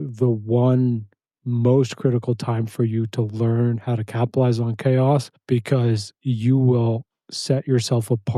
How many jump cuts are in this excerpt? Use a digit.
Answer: 1